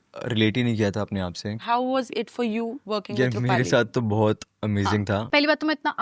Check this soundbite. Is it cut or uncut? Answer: cut